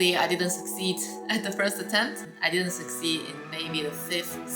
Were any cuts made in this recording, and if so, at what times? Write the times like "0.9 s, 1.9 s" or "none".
2.3 s